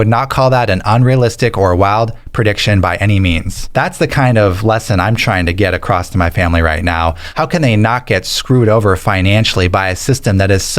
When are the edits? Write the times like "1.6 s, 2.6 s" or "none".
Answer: 3.5 s, 7.2 s